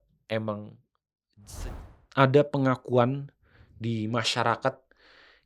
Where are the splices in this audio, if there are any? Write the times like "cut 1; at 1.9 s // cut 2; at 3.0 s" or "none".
cut 1; at 1.7 s